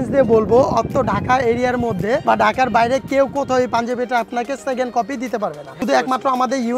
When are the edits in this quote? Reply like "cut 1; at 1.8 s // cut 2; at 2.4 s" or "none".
cut 1; at 2.2 s // cut 2; at 5.8 s